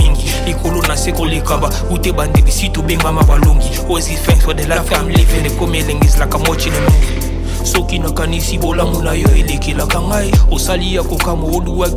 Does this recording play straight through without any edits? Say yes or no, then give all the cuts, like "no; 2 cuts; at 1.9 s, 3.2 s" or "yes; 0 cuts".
yes; 0 cuts